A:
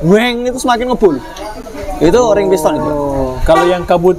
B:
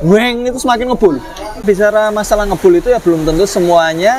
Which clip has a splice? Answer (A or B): B